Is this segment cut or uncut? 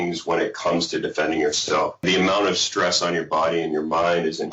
cut